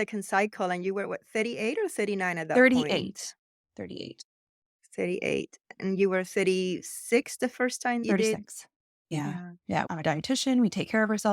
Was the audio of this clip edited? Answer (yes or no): yes